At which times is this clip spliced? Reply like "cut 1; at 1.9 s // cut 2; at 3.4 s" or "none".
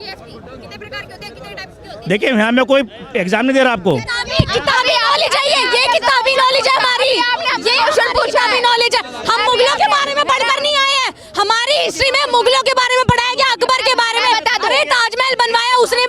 none